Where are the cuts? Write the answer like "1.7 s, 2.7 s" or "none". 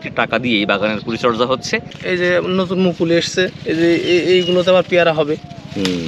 2.0 s